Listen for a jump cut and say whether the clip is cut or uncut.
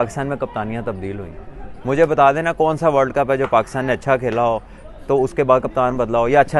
uncut